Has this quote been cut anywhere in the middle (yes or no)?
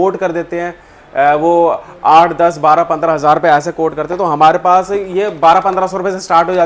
no